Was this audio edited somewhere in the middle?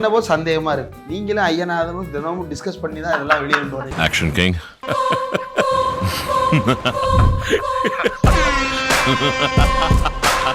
yes; 1 cut; at 1.0 s

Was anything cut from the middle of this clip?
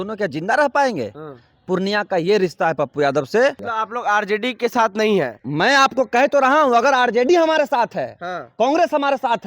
yes; 2 cuts; at 3.7 s, 5.4 s

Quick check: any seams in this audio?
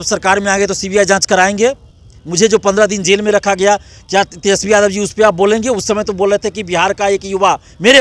no; 0 cuts

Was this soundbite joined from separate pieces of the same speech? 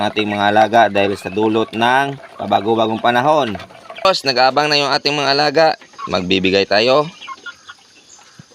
yes; 1 cut; at 4.1 s

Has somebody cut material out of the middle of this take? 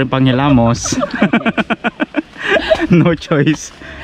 no; 0 cuts

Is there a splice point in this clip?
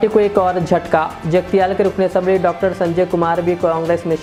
no; 0 cuts

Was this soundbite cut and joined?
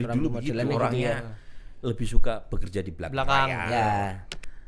no; 0 cuts

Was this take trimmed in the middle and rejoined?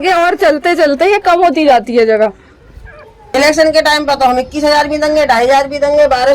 yes; 1 cut; at 3.2 s

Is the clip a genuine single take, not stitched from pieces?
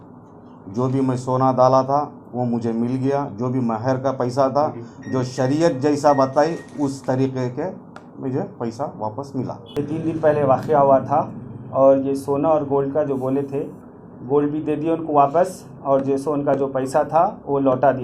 no; 1 cut; at 9.6 s

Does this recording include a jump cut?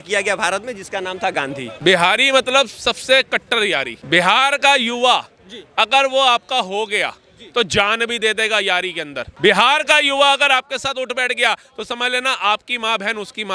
yes; 3 cuts; at 1.6 s, 3.9 s, 9.2 s

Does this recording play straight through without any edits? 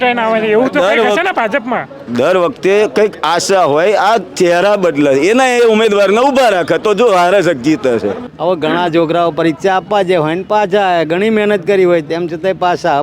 no; 1 cut; at 8.3 s

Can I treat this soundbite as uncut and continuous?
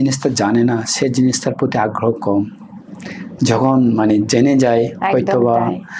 yes; 0 cuts

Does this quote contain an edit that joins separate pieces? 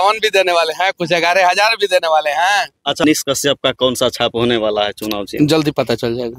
yes; 1 cut; at 3.0 s

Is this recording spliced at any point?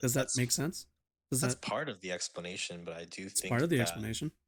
no; 0 cuts

